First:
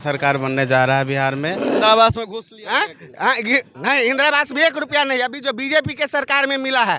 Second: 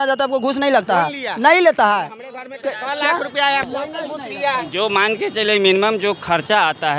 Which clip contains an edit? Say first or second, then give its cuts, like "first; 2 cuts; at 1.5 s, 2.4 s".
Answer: first; 1 cut; at 1.6 s